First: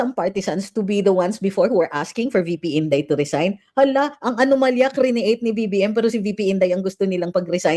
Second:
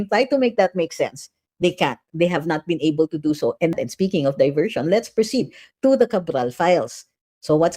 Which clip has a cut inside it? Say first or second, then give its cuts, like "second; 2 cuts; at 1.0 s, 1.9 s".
second; 1 cut; at 3.8 s